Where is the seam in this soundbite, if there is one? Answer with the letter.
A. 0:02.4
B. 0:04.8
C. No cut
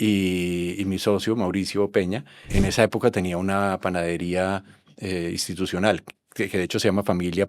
A